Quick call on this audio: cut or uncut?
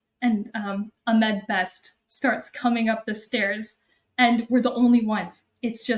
uncut